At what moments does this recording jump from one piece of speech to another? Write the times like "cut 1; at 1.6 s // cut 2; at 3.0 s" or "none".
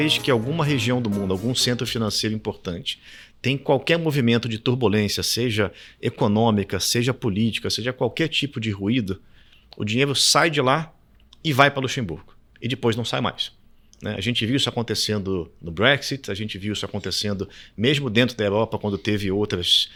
none